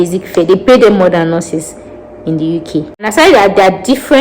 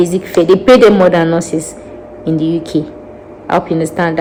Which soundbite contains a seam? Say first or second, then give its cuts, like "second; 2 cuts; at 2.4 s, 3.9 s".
first; 1 cut; at 3.1 s